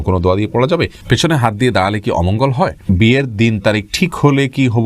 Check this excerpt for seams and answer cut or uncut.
cut